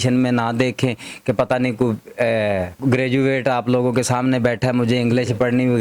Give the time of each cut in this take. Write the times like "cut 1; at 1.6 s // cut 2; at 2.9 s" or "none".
cut 1; at 2.7 s